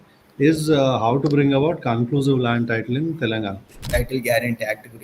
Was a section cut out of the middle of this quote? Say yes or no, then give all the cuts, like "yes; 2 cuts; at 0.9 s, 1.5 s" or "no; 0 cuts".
yes; 1 cut; at 3.8 s